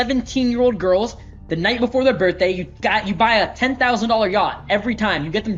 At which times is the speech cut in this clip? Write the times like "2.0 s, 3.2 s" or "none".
none